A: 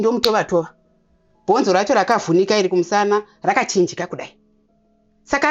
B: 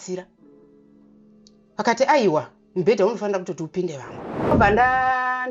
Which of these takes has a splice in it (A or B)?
B